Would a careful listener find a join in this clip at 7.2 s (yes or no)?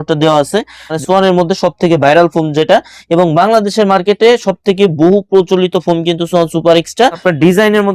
yes